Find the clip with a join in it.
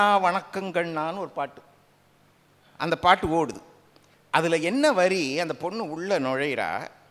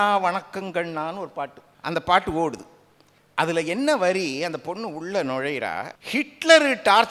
second; 2 cuts; at 1.7 s, 5.9 s

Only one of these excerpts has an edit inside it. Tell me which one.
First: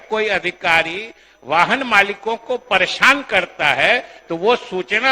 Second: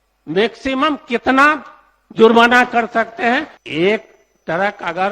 second; 1 cut; at 3.5 s

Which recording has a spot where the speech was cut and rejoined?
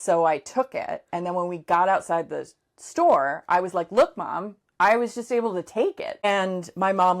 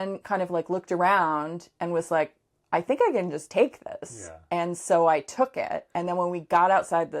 first; 1 cut; at 6.2 s

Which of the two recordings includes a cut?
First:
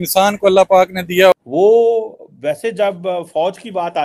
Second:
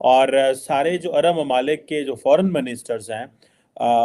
first; 1 cut; at 1.3 s

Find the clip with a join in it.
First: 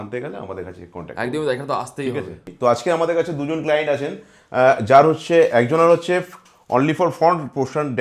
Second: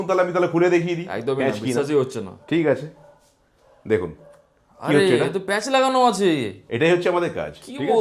first; 1 cut; at 2.4 s

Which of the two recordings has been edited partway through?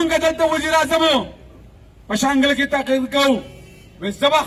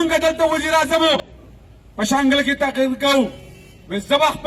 second; 1 cut; at 1.2 s

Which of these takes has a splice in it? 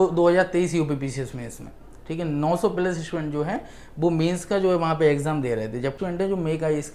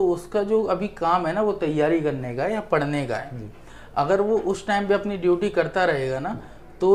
first; 1 cut; at 6.0 s

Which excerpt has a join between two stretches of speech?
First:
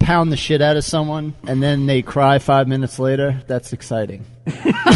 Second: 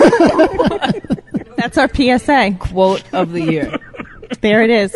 first; 1 cut; at 4.0 s

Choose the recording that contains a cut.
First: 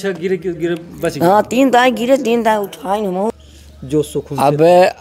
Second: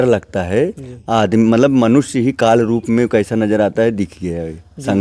first; 1 cut; at 3.4 s

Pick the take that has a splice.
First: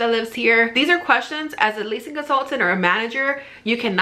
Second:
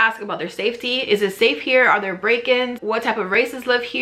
second; 1 cut; at 2.8 s

